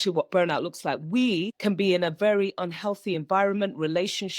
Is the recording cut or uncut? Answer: cut